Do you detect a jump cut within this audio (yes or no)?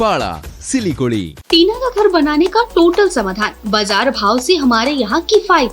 yes